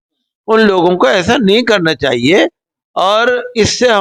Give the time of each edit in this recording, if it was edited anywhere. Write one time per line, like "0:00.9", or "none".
none